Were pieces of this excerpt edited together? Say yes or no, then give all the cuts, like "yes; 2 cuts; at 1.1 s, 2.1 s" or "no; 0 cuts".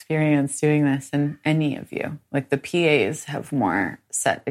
no; 0 cuts